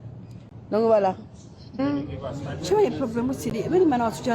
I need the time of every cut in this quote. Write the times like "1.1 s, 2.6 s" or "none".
1.8 s